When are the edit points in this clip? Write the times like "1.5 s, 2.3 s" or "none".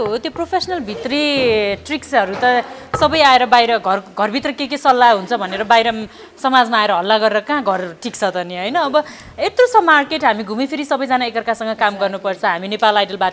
none